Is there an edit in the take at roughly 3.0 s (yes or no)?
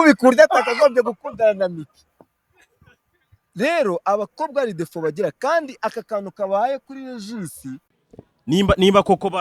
no